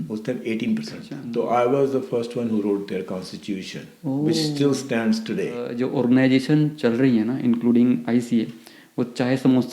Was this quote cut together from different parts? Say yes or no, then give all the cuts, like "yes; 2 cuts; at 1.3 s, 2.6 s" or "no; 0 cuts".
yes; 2 cuts; at 1.1 s, 5.7 s